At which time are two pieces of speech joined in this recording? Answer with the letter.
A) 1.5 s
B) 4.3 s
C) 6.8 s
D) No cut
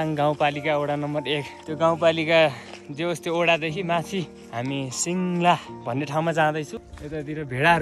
C